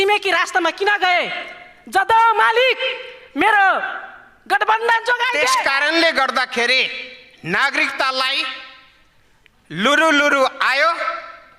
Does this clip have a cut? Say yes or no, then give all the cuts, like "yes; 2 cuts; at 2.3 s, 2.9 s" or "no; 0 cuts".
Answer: yes; 1 cut; at 5.6 s